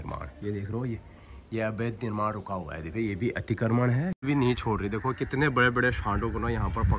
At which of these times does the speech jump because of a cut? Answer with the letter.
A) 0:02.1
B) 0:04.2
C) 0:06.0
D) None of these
B